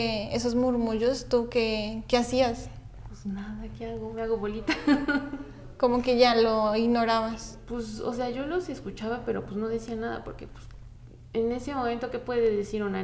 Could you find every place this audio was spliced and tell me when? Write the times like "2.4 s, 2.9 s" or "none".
none